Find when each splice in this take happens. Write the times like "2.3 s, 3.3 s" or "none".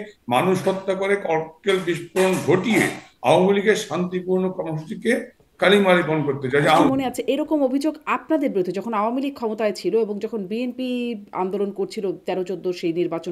6.8 s